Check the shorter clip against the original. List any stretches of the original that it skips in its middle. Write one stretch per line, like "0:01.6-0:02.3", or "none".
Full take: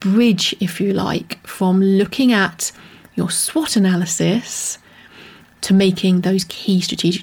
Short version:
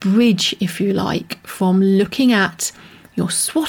none